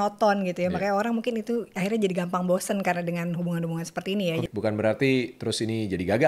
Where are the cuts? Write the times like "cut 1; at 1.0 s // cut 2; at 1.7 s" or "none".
cut 1; at 4.5 s